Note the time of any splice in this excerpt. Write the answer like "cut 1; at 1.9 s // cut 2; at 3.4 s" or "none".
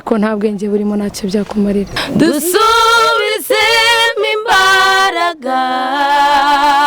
cut 1; at 2.0 s